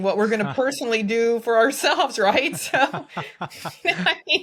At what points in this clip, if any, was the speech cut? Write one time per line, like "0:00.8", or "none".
none